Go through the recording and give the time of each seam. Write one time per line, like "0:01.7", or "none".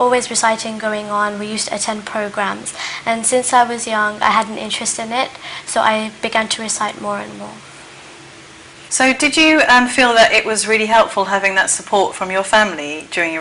0:03.8